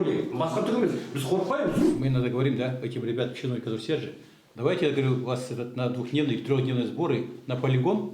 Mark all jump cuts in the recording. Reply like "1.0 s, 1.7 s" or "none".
1.8 s